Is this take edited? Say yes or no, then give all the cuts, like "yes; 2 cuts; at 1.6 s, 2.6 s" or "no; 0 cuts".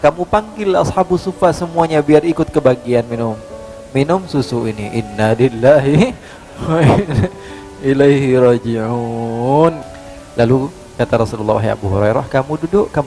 yes; 1 cut; at 9.8 s